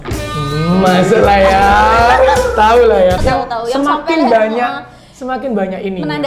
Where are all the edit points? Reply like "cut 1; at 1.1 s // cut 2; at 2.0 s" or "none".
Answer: cut 1; at 3.2 s